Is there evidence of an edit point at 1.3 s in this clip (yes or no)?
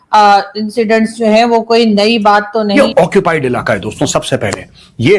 no